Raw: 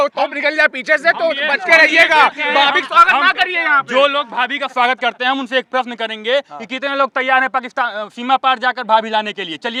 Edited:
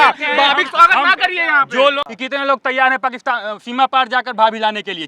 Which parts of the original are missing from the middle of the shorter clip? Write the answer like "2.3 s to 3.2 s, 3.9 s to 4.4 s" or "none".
4.2 s to 6.6 s